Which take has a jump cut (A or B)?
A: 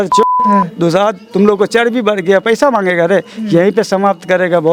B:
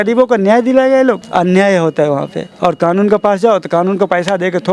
B